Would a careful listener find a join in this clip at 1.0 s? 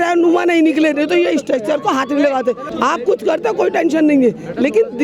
no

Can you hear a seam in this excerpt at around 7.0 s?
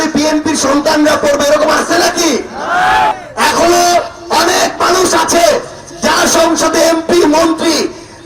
no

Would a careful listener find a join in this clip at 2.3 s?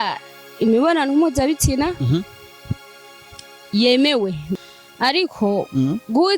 no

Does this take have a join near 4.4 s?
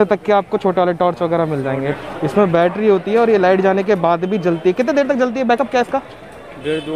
no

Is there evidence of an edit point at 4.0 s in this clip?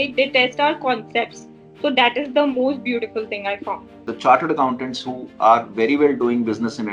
yes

